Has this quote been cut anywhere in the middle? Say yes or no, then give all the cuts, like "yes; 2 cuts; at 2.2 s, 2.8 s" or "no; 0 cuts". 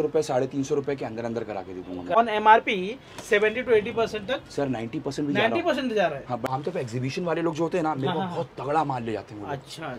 yes; 2 cuts; at 2.2 s, 6.4 s